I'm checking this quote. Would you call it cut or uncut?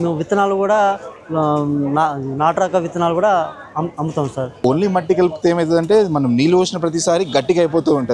cut